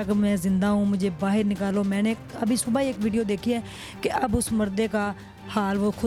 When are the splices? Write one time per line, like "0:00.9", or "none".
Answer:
none